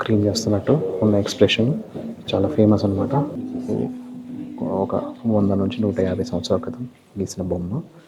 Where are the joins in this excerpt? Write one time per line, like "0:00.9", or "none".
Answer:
0:03.4

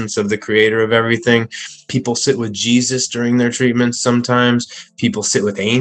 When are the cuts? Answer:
0:01.9

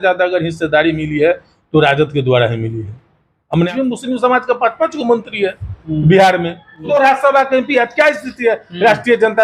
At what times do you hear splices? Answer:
0:03.7
0:06.9

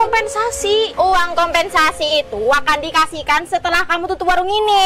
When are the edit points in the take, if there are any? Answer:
0:00.9

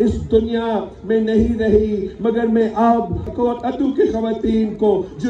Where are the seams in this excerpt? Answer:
0:03.3

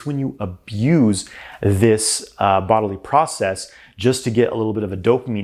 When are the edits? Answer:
none

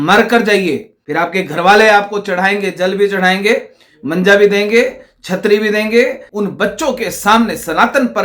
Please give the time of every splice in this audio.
0:01.0
0:06.2

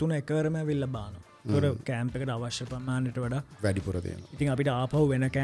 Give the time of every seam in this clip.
none

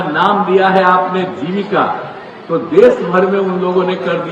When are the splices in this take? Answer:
none

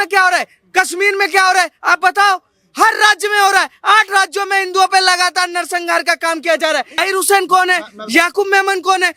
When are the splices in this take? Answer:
0:07.0

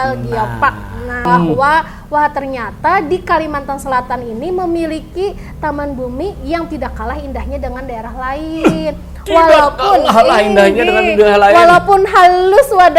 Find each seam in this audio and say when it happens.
0:01.2

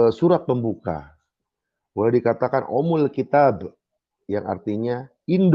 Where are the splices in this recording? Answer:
none

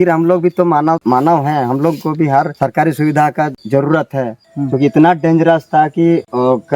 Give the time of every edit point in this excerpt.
0:01.0
0:02.5
0:03.6
0:04.4

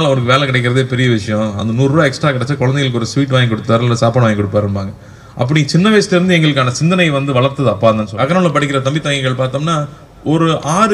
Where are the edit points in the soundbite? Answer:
0:08.1

